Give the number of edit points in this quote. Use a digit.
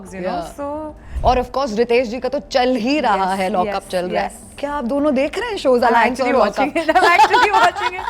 1